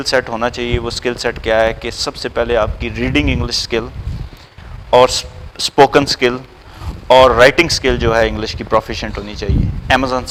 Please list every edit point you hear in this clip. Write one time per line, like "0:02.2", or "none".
none

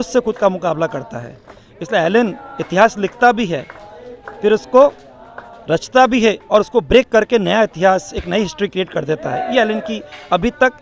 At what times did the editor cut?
none

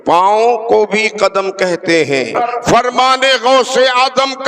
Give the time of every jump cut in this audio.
0:02.3

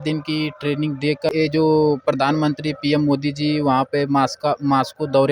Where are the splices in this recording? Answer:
0:01.3

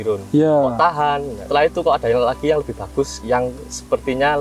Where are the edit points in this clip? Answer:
0:01.4
0:03.2

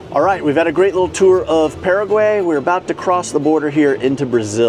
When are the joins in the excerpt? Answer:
none

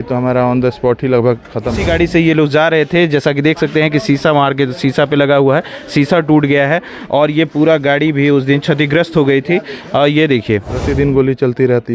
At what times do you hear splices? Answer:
0:01.8
0:10.8

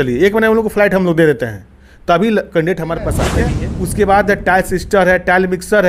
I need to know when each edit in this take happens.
0:03.4

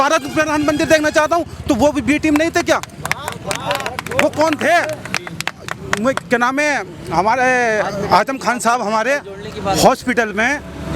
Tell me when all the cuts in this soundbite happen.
none

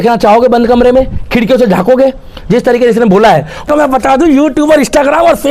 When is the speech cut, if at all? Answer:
0:03.7

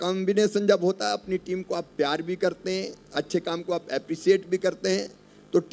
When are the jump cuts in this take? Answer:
none

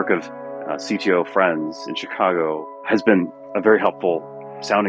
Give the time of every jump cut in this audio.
0:02.8

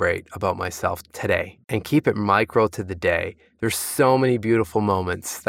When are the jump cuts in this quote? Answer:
0:01.6

